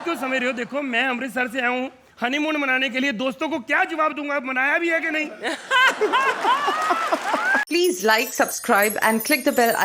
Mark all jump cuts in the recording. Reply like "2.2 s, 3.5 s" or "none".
7.6 s